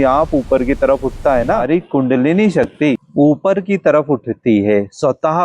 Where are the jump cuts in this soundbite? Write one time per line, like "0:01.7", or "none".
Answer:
0:01.6

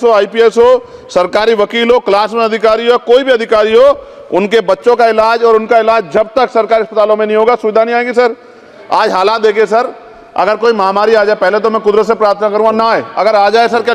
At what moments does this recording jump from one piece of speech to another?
0:08.7

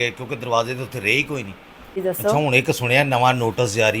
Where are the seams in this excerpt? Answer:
0:02.0

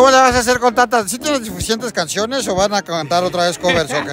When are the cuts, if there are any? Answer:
none

